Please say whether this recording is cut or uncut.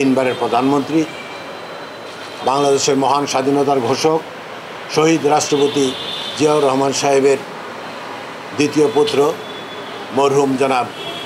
uncut